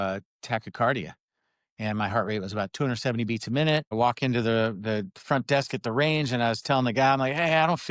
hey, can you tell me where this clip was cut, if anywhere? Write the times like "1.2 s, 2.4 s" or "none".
3.9 s